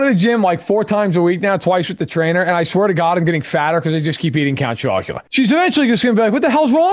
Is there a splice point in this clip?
yes; 1 cut; at 5.2 s

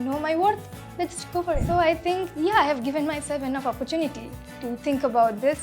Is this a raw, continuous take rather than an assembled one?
no; 1 cut; at 1.6 s

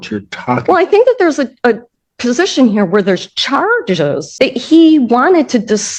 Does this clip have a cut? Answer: no; 0 cuts

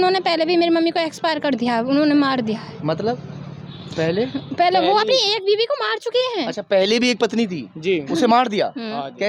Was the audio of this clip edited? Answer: no; 0 cuts

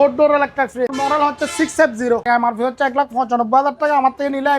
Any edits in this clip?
yes; 2 cuts; at 0.9 s, 2.2 s

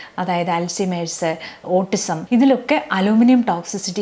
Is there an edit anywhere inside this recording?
yes; 1 cut; at 2.2 s

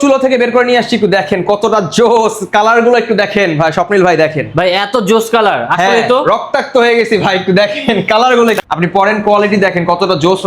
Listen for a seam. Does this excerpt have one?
yes; 1 cut; at 8.6 s

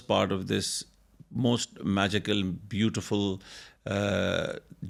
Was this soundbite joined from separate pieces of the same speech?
no; 0 cuts

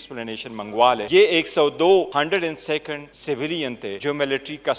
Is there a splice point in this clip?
yes; 4 cuts; at 1.0 s, 2.1 s, 3.1 s, 4.0 s

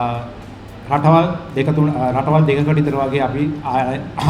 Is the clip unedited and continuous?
yes; 0 cuts

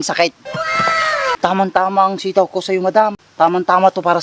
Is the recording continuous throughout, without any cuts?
no; 2 cuts; at 1.4 s, 3.2 s

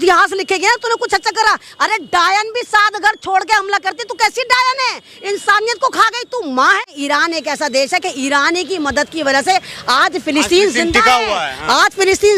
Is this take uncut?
no; 1 cut; at 6.9 s

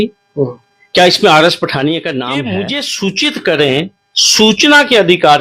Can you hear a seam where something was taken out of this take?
yes; 1 cut; at 2.3 s

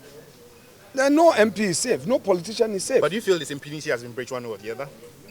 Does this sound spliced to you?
no; 0 cuts

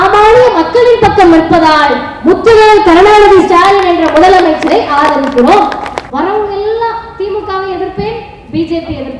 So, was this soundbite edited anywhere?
yes; 1 cut; at 6.0 s

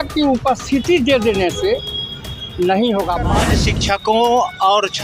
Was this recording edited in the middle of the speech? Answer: yes; 1 cut; at 3.4 s

